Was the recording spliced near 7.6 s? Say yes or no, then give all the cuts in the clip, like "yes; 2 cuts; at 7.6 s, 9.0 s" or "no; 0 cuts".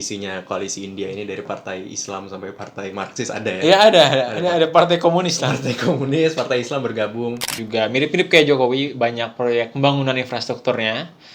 yes; 1 cut; at 7.6 s